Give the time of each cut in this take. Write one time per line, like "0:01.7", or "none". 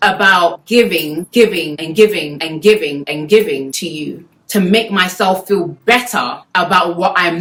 none